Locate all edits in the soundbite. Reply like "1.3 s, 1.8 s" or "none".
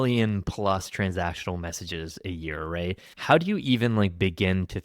3.1 s